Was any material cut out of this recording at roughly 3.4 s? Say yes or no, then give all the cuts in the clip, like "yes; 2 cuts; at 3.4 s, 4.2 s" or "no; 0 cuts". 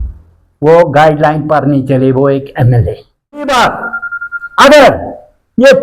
yes; 1 cut; at 3.4 s